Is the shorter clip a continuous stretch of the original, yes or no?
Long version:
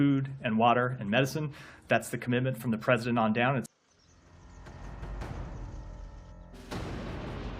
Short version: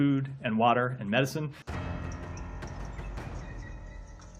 no